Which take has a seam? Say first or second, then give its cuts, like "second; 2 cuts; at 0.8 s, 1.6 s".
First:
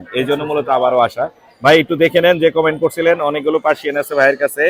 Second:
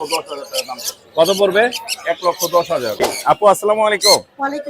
second; 1 cut; at 3.0 s